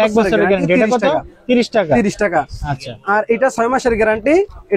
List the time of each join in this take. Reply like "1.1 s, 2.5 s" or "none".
none